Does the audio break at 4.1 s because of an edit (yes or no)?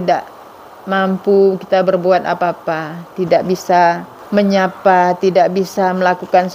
yes